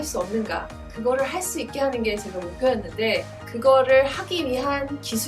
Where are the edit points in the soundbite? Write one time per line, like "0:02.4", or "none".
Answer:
0:03.4

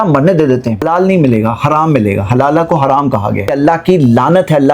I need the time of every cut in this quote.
0:00.8
0:03.5

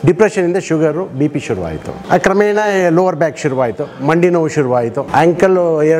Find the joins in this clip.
0:01.9
0:05.0

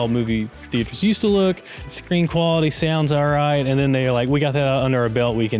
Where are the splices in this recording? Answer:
0:01.7

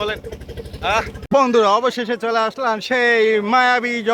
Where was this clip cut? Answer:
0:01.2

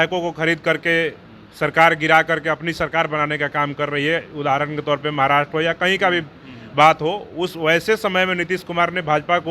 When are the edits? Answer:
none

